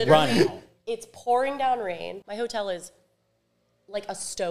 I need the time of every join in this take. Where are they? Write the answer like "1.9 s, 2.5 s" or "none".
2.2 s